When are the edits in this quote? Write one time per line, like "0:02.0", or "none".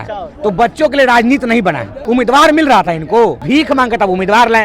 0:01.9
0:03.4